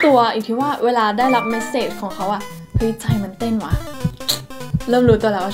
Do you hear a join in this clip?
no; 0 cuts

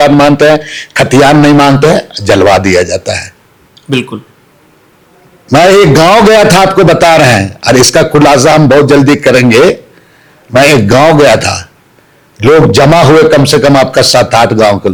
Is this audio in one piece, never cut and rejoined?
yes; 0 cuts

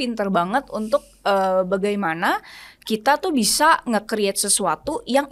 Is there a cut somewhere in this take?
no; 0 cuts

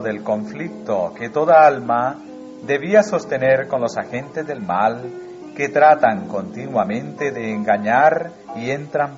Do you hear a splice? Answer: no; 0 cuts

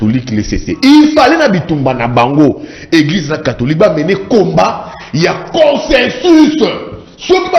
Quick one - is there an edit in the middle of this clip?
no; 0 cuts

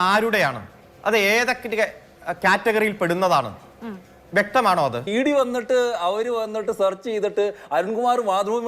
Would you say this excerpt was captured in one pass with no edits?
no; 1 cut; at 5.0 s

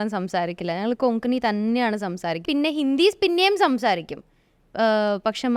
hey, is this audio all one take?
no; 1 cut; at 2.4 s

